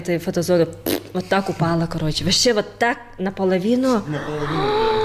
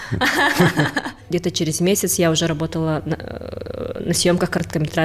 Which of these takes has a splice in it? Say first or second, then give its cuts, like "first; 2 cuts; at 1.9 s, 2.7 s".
second; 1 cut; at 1.2 s